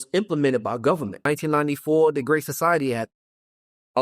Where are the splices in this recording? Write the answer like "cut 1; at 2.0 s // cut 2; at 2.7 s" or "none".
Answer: cut 1; at 1.2 s

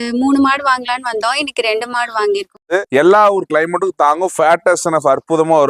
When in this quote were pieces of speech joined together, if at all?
cut 1; at 2.8 s

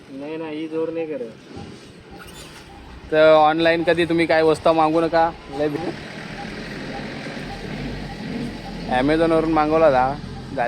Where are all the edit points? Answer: cut 1; at 5.6 s

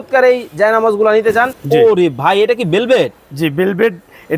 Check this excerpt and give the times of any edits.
cut 1; at 1.6 s

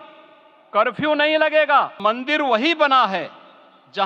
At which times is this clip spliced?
cut 1; at 1.9 s

